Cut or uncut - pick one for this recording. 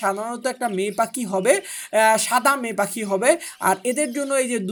uncut